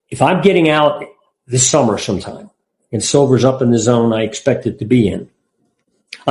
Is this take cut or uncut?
uncut